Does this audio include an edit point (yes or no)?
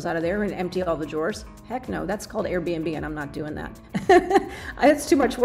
no